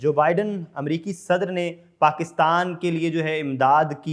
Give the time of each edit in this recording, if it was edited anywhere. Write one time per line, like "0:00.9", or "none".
none